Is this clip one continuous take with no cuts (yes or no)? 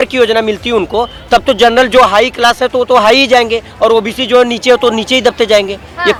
yes